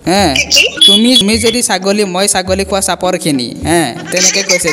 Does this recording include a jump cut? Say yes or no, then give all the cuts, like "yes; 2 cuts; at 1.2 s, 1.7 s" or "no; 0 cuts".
yes; 1 cut; at 1.2 s